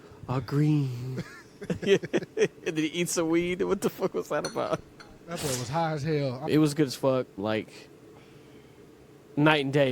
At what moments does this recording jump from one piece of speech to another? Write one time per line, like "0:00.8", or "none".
0:06.4

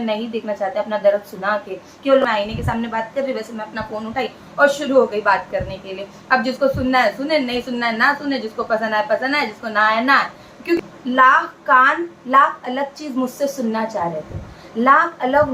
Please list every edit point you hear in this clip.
0:02.2
0:10.8

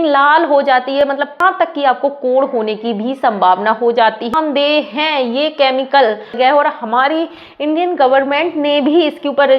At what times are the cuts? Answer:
0:01.2
0:04.3
0:06.4

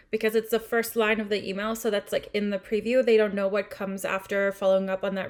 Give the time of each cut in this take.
none

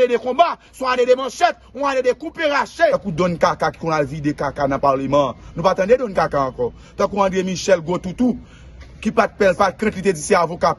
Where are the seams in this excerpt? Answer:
0:02.9

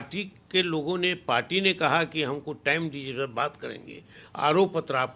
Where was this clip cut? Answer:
none

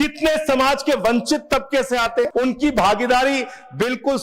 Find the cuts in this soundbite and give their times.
0:02.3

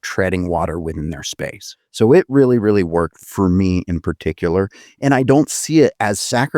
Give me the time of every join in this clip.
0:01.7
0:03.2

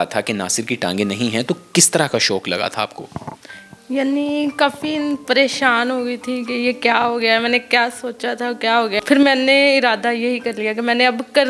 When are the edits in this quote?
0:09.0

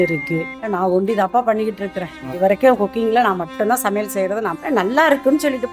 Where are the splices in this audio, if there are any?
0:04.6

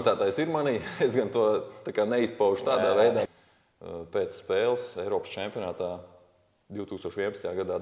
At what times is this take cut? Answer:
0:03.3

